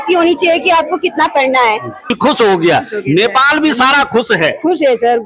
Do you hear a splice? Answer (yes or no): yes